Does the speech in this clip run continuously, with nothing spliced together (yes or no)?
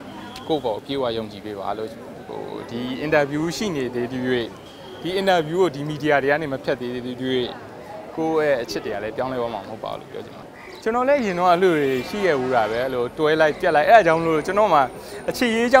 no